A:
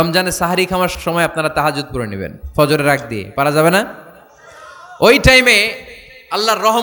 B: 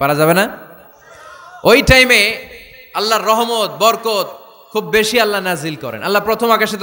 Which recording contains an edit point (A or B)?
A